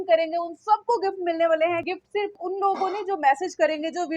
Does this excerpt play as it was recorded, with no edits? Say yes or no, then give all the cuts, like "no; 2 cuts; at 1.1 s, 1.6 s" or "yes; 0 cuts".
no; 1 cut; at 2.3 s